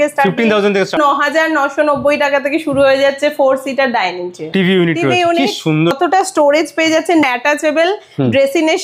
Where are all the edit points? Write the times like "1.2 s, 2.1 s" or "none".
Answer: 1.0 s, 4.5 s, 5.9 s, 7.2 s